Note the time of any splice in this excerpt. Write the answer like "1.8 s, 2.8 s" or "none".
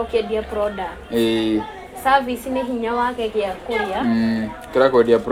none